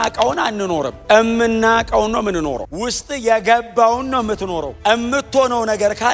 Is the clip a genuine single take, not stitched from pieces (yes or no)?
no